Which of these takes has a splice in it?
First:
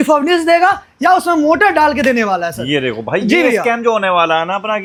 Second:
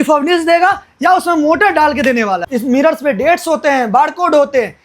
second; 1 cut; at 2.4 s

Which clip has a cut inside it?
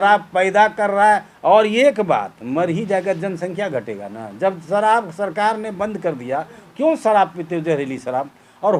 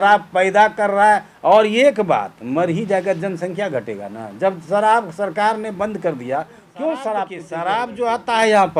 second; 1 cut; at 7.4 s

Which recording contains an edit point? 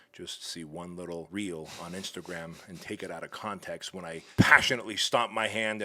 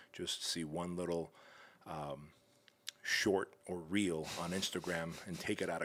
first; 2 cuts; at 1.3 s, 4.3 s

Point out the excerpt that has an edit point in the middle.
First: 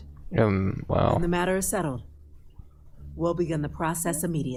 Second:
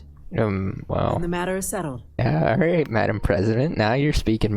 second; 1 cut; at 2.1 s

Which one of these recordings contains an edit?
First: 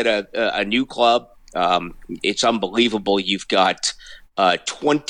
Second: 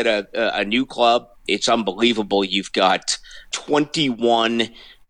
second; 2 cuts; at 1.4 s, 3.5 s

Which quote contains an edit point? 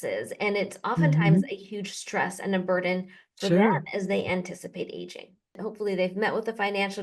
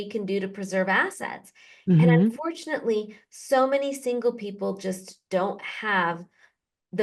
first; 1 cut; at 5.6 s

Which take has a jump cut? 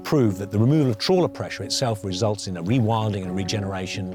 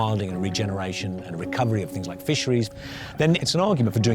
second; 1 cut; at 3.1 s

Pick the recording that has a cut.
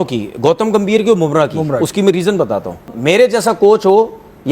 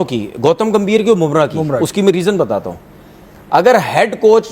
first; 1 cut; at 2.9 s

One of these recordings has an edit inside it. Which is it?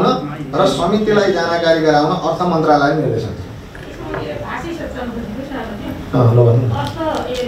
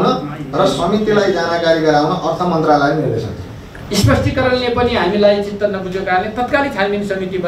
second; 1 cut; at 3.7 s

